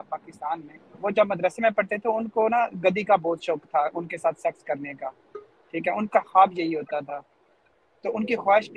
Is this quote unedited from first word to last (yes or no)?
no